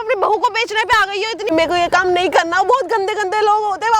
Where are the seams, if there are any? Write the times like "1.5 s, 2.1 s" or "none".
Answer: 1.5 s